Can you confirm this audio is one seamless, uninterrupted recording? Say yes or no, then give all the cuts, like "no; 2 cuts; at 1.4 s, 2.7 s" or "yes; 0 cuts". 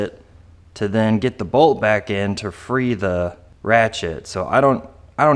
no; 1 cut; at 3.5 s